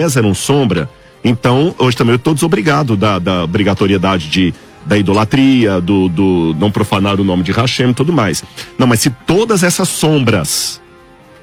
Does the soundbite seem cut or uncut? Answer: uncut